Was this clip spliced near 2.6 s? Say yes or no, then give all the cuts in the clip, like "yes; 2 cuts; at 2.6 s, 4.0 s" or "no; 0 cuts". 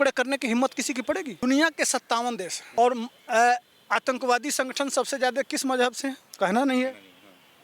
yes; 3 cuts; at 1.4 s, 2.6 s, 6.3 s